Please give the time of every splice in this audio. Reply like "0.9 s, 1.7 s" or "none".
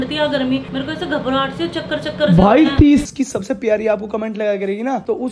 3.0 s

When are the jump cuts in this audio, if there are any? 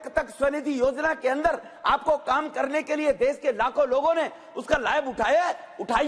none

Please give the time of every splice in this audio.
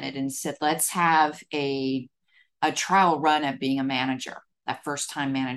none

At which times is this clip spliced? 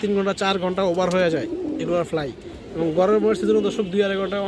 none

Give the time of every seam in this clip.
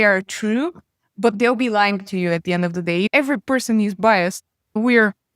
3.1 s

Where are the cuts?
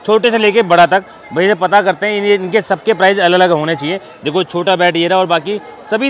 none

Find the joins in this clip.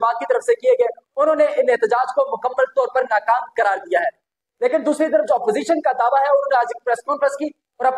none

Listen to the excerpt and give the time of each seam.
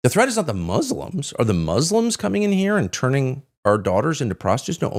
none

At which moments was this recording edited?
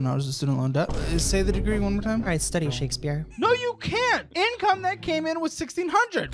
3.3 s

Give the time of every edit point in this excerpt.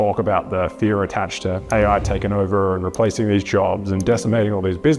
1.6 s

